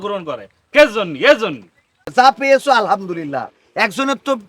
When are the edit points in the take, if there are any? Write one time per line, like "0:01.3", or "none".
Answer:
0:02.0

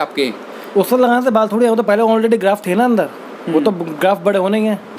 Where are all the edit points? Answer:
none

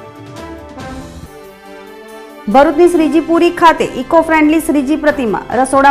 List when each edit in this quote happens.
0:00.9

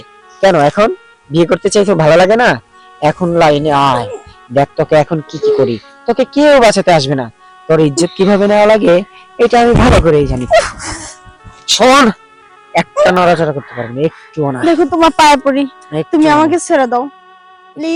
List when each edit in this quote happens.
none

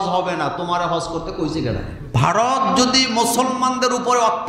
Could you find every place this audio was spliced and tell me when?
0:02.0

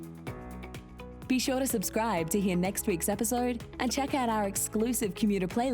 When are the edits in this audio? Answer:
0:01.2

